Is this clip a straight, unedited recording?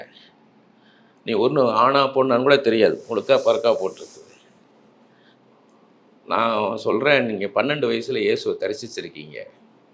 yes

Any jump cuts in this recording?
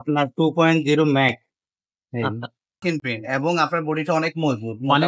yes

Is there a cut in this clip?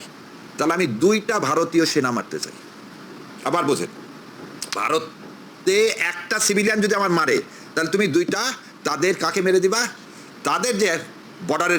no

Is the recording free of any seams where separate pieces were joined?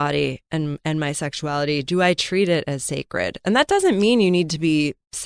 yes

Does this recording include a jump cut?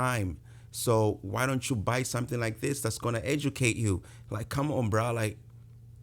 no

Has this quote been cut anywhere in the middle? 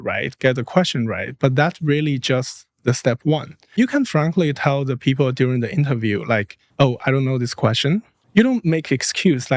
yes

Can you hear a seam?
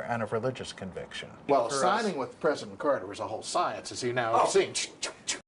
yes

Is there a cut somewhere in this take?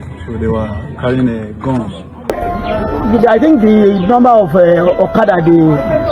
yes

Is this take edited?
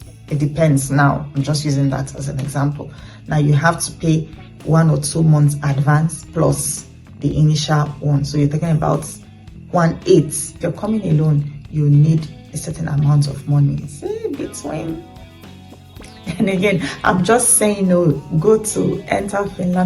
yes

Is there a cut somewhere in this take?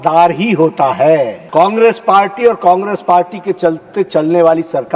yes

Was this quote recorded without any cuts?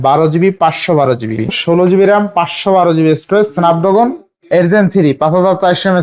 no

